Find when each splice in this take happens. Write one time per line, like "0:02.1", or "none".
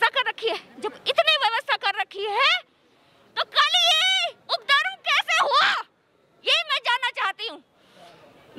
none